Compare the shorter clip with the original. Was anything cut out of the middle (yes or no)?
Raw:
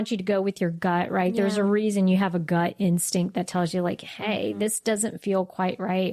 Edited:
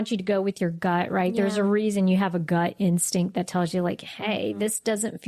no